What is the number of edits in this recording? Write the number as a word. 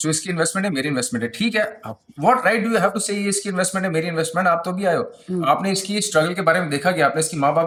zero